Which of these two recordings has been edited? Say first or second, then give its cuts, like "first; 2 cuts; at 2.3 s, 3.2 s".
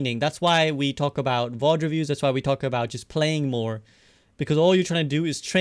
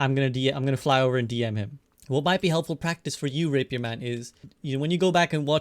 second; 2 cuts; at 2.0 s, 4.5 s